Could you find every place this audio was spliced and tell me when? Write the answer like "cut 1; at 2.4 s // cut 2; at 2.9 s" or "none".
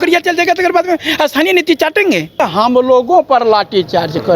cut 1; at 2.4 s